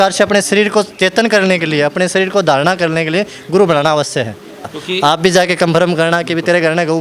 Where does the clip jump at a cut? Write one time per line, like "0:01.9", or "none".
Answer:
0:04.7